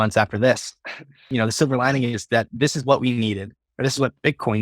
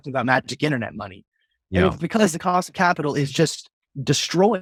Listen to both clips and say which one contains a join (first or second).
first